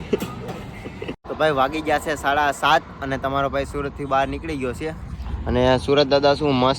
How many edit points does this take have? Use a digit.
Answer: 1